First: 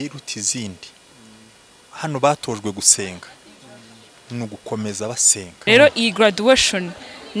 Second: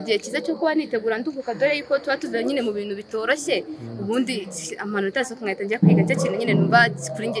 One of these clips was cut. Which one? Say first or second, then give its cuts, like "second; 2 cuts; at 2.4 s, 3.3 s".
first; 1 cut; at 5.5 s